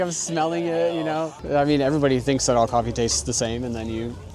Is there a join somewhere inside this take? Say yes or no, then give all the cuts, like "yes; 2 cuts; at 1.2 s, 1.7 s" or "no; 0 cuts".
yes; 1 cut; at 1.3 s